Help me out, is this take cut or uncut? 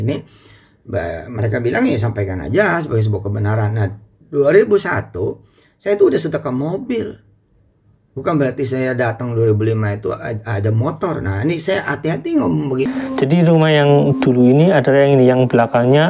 cut